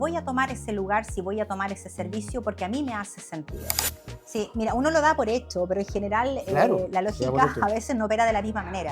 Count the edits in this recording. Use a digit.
1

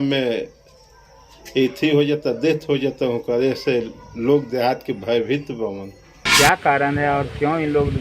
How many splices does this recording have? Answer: 1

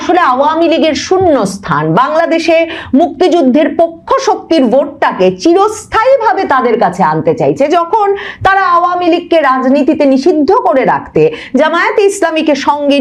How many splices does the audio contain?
0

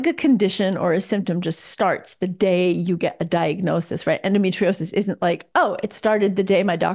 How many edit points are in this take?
0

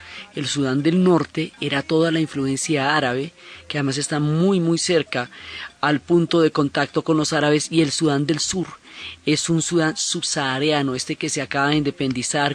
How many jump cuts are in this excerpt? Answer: 1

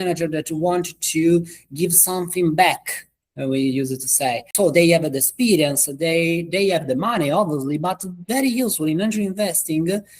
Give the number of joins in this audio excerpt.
1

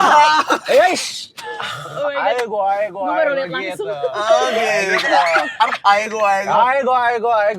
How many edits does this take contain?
0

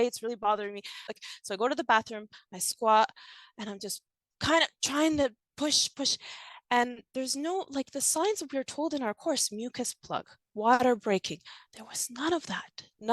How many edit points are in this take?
1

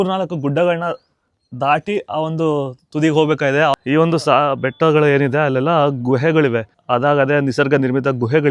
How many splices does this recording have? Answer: 2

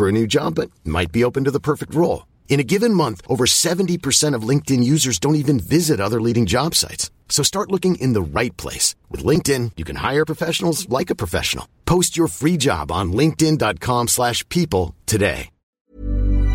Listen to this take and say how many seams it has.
1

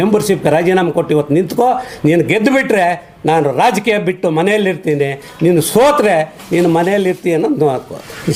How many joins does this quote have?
0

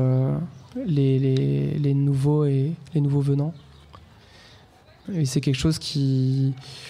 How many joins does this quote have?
1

